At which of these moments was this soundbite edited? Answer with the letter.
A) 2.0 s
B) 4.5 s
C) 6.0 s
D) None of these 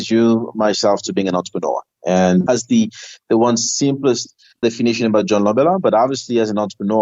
D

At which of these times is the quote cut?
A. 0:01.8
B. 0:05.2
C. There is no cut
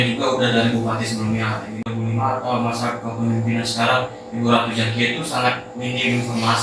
A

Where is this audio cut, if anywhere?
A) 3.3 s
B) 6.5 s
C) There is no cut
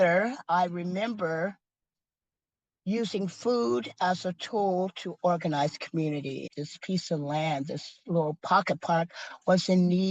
B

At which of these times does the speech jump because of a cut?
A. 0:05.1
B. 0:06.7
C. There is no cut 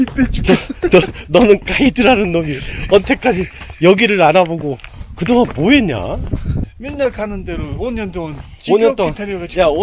B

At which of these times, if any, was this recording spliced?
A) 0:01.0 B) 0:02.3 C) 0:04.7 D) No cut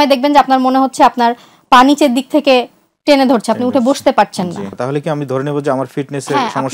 C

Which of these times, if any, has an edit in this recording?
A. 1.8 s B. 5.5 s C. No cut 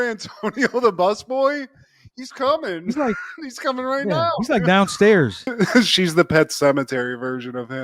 B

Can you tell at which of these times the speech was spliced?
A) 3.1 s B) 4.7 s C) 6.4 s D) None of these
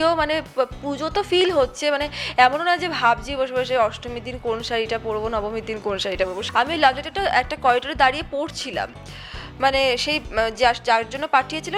C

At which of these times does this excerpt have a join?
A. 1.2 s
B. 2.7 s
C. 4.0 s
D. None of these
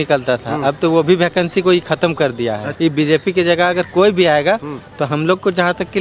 B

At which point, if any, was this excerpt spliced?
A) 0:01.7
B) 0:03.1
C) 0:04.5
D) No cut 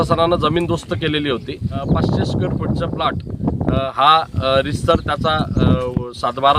A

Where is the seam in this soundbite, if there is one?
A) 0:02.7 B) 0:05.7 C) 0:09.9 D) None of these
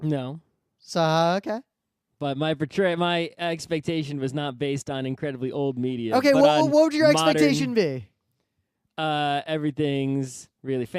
B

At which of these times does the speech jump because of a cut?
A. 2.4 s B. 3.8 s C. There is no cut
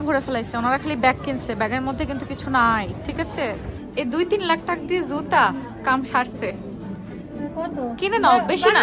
B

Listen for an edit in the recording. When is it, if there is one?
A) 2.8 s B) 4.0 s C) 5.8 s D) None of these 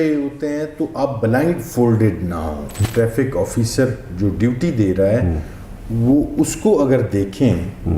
A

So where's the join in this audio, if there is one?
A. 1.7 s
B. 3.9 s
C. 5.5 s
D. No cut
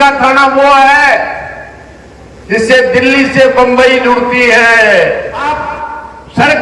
C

